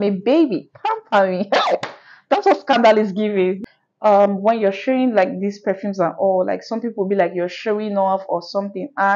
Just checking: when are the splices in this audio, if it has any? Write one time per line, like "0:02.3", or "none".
0:03.6